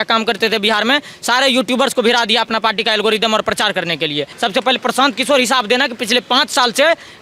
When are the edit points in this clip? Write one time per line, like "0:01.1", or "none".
0:04.3